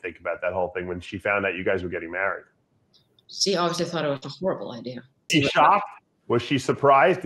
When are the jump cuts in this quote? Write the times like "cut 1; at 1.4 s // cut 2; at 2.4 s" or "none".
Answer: cut 1; at 5.3 s